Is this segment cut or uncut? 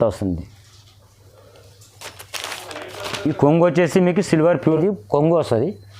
cut